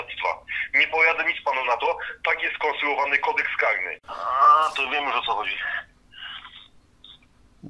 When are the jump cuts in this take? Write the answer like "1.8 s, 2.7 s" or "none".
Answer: 3.9 s